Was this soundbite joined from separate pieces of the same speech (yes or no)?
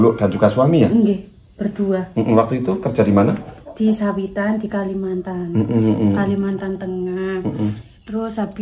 no